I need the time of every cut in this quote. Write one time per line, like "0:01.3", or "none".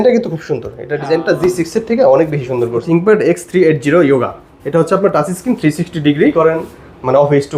0:02.8
0:06.3